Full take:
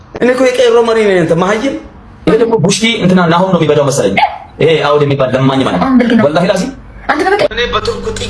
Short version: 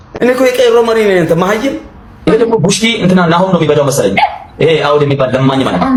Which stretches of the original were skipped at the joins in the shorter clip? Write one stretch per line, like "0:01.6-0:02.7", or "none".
none